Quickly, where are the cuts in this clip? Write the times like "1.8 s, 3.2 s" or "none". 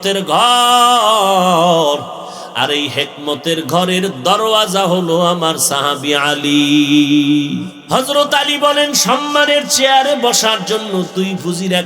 7.7 s